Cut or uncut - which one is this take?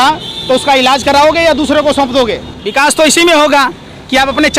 cut